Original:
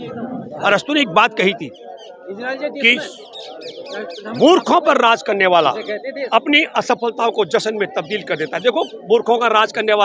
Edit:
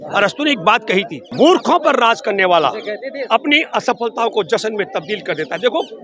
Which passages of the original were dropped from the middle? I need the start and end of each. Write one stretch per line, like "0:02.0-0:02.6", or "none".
0:01.7-0:04.2